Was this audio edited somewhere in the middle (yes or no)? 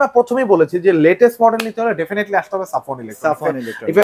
no